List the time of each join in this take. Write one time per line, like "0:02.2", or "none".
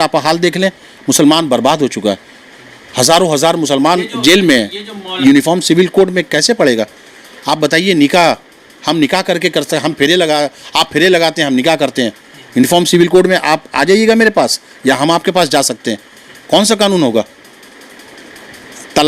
0:05.2